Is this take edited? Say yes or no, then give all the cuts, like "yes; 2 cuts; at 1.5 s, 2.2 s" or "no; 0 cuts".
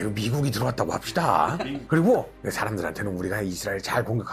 yes; 1 cut; at 1.8 s